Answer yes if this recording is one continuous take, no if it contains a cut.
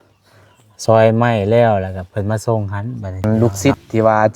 no